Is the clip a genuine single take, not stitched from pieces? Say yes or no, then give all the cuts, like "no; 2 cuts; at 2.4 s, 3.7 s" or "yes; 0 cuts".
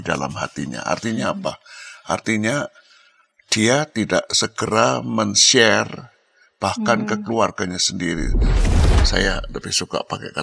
no; 1 cut; at 8.7 s